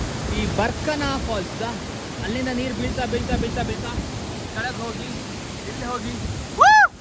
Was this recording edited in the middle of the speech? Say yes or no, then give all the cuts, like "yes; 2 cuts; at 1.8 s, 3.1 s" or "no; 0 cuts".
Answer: no; 0 cuts